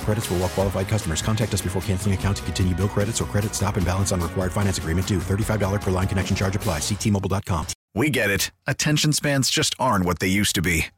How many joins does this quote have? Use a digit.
1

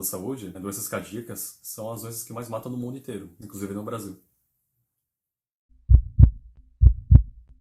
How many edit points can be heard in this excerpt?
0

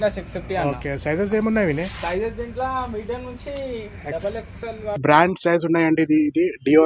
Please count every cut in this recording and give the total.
1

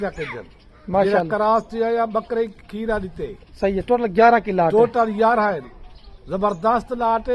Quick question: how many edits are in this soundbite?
0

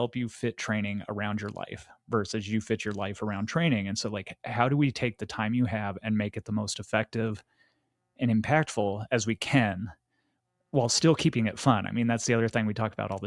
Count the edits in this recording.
0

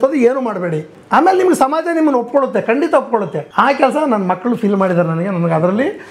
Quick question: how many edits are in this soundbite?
2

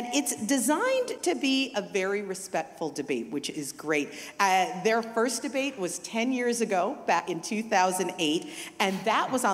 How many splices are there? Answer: 1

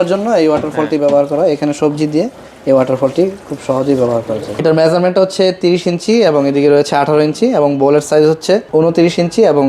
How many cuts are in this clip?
2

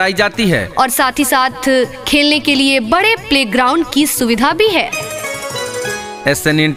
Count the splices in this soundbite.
0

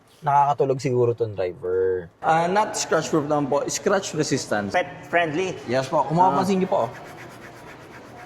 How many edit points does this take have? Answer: 1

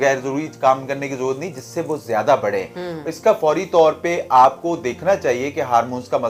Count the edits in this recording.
0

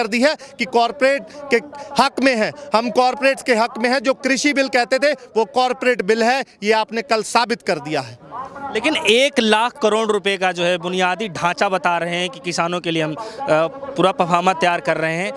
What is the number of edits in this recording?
0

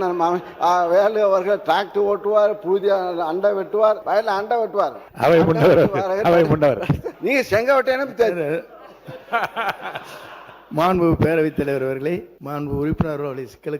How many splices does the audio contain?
4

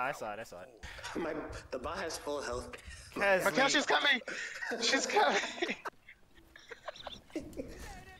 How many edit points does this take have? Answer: 1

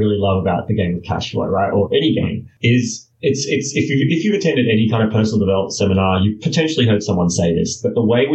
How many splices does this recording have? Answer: 1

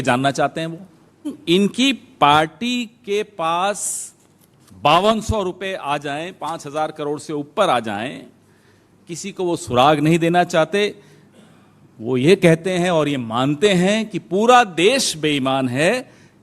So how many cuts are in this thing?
1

